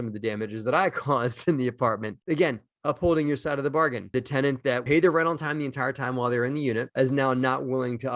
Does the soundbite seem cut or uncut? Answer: uncut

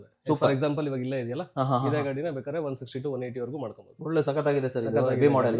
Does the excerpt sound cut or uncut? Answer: uncut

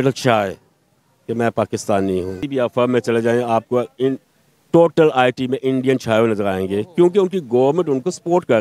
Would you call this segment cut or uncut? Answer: cut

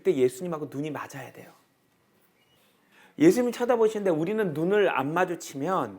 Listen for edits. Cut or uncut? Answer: cut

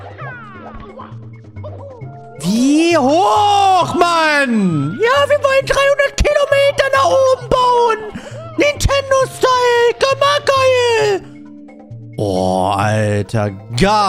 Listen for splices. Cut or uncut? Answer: uncut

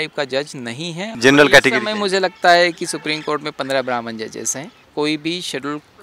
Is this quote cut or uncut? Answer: cut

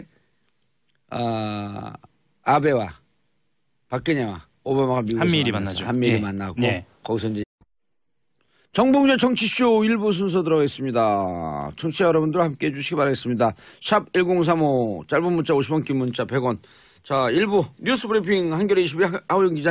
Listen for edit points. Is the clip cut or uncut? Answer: uncut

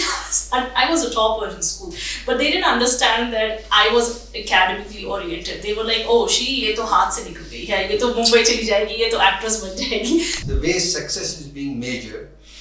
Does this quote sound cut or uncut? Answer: cut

